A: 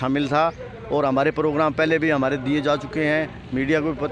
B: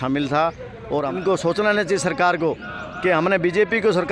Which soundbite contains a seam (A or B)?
B